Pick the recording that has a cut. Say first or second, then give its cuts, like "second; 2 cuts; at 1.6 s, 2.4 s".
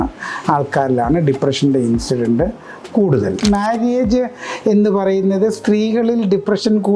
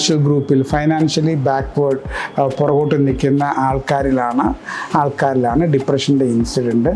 first; 1 cut; at 3.4 s